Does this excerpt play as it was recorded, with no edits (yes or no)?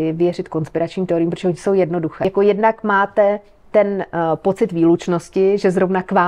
no